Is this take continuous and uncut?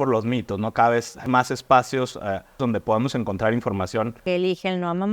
no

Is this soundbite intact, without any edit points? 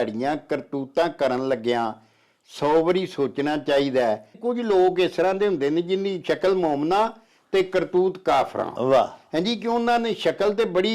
no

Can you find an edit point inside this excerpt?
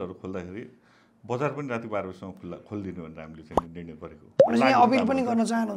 yes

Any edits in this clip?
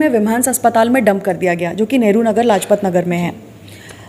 no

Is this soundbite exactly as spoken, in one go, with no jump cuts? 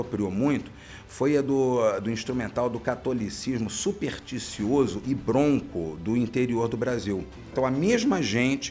no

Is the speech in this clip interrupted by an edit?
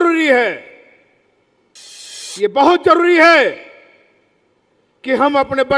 yes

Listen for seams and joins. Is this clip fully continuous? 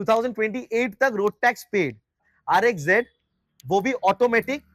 no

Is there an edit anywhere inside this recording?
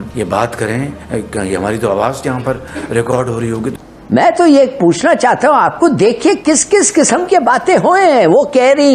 yes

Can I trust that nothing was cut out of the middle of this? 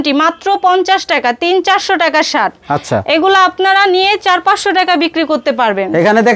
yes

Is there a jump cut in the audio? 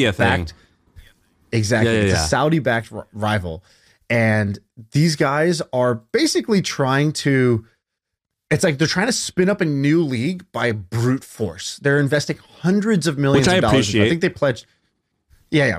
no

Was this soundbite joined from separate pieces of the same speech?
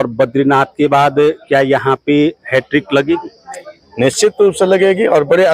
no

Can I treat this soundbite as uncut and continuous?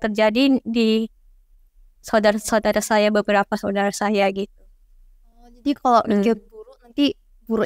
yes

